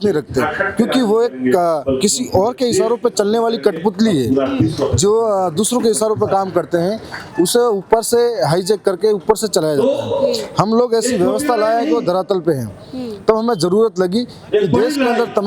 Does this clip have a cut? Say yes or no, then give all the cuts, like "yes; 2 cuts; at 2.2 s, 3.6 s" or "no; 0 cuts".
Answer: no; 0 cuts